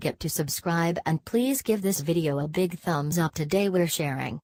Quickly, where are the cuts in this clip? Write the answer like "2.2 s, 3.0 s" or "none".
none